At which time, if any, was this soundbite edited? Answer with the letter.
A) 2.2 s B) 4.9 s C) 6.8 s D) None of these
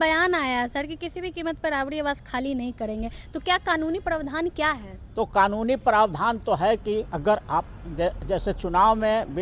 D